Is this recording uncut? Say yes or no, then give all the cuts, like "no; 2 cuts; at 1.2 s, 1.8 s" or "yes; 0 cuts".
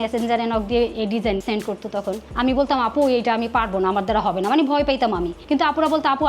yes; 0 cuts